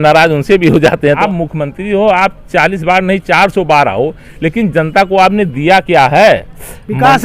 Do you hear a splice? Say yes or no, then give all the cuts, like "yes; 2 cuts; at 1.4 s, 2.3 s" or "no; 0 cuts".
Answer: yes; 1 cut; at 1.2 s